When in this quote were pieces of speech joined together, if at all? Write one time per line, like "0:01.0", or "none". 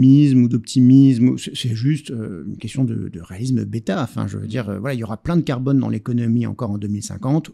none